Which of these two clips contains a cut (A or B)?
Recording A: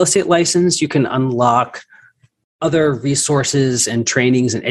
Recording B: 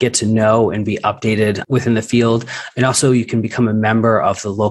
B